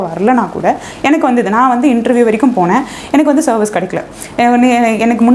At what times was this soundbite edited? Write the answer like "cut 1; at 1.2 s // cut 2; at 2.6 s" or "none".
none